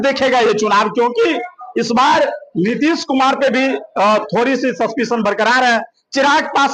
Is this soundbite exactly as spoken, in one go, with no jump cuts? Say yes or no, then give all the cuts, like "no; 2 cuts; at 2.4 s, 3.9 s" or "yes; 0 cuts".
yes; 0 cuts